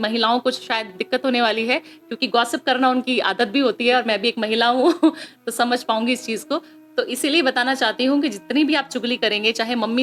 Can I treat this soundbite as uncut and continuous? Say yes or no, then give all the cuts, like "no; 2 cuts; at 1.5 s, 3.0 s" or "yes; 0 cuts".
yes; 0 cuts